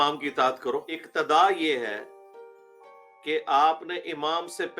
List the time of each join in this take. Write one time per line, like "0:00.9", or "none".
0:01.0